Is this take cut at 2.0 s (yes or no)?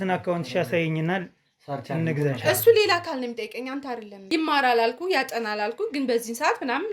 no